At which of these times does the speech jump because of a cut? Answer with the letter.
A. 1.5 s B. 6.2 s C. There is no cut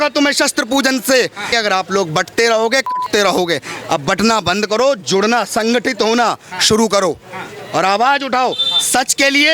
A